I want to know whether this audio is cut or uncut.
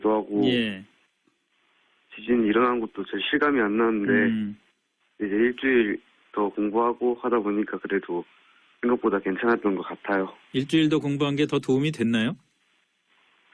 cut